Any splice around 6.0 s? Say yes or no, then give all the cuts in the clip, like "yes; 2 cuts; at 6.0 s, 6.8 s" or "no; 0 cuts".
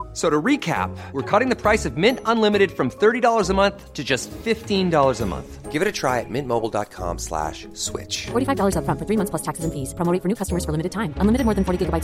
no; 0 cuts